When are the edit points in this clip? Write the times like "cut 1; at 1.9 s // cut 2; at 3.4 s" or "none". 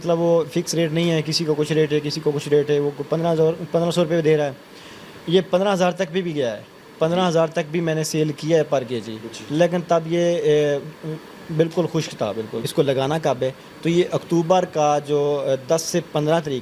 cut 1; at 12.6 s